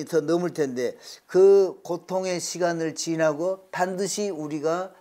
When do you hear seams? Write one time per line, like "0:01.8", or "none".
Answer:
none